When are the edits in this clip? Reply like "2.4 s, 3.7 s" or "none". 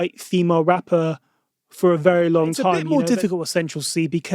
2.8 s